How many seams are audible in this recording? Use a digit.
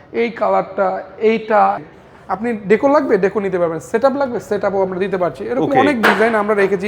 1